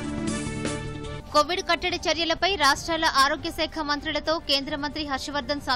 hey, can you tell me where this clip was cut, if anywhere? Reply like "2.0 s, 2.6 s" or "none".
1.1 s

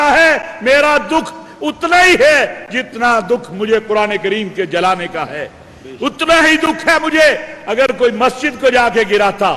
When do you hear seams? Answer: none

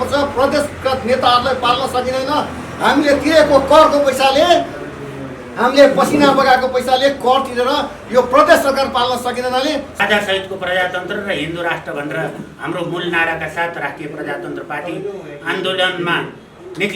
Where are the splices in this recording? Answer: 9.9 s

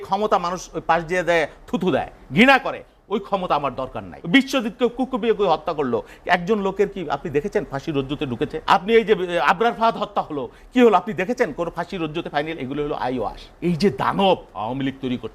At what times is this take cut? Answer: 4.1 s, 8.6 s, 13.4 s

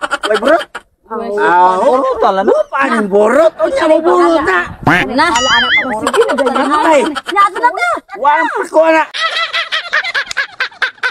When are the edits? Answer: 9.2 s

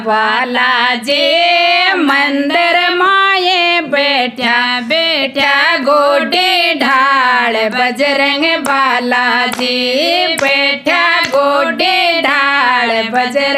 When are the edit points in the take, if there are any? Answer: none

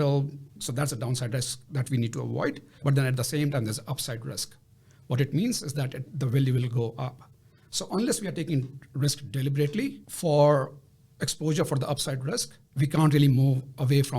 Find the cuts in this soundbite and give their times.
2.7 s, 12.6 s

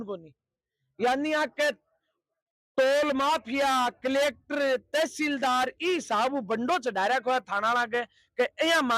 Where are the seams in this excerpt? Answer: none

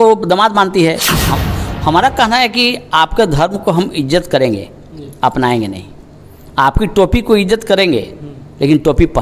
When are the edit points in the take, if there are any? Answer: 1.2 s

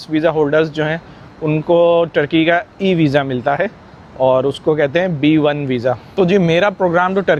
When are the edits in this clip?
none

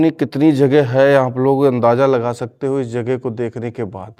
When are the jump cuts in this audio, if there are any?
none

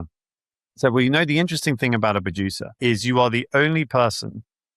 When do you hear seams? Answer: 2.7 s

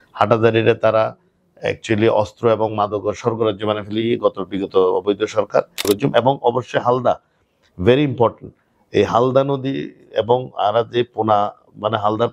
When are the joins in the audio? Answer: 5.9 s

